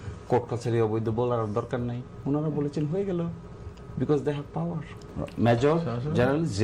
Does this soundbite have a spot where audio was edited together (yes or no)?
yes